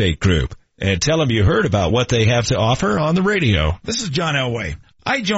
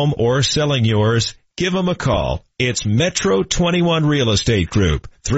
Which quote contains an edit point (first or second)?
first